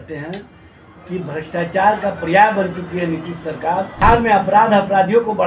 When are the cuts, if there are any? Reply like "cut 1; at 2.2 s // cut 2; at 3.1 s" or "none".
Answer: cut 1; at 4.0 s